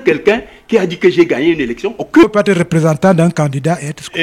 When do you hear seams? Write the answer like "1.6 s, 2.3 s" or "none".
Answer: 2.2 s